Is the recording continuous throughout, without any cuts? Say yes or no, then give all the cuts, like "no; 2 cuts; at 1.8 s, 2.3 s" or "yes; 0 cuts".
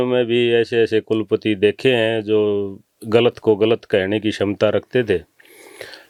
yes; 0 cuts